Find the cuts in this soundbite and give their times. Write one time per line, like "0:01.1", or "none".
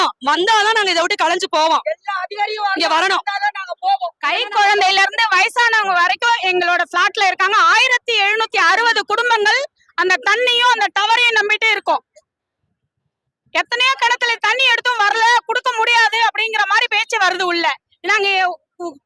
none